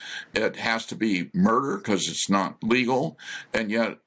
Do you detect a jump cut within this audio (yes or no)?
no